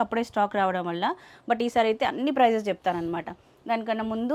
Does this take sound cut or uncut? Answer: uncut